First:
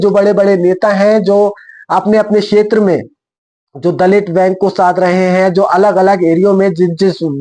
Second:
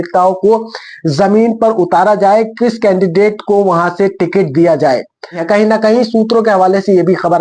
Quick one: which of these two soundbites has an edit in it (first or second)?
second